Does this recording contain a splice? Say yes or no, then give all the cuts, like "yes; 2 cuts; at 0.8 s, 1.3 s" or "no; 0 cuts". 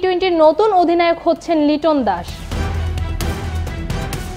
yes; 1 cut; at 2.4 s